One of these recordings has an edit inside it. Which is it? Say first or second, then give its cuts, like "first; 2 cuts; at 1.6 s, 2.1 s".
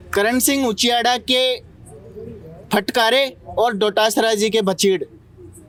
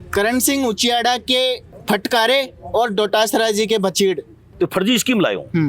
second; 2 cuts; at 1.7 s, 4.5 s